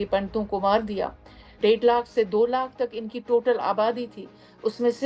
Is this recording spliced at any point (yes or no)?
yes